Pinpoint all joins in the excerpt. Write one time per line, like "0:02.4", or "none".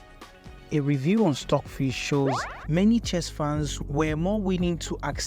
0:02.5